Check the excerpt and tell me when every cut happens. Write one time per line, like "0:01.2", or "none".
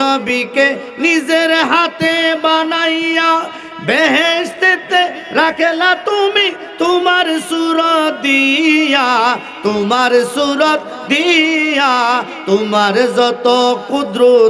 none

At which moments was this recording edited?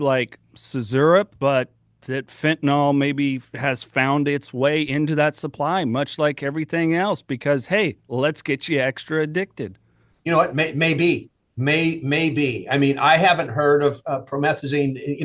0:01.3

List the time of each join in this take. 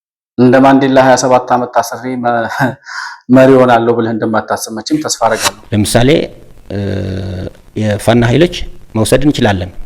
0:05.5

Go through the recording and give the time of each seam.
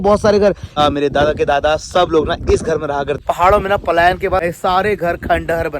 0:00.8
0:03.2
0:04.5

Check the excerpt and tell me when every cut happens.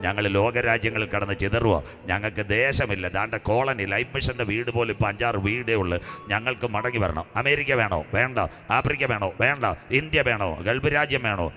none

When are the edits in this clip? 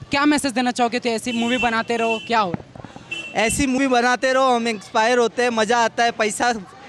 0:03.8

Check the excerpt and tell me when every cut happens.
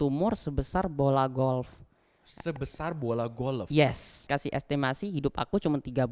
0:04.2

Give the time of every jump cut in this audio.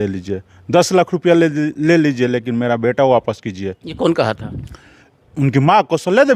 none

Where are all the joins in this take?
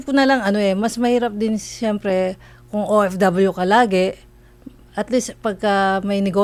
none

